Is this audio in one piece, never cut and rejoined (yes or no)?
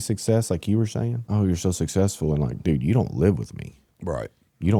no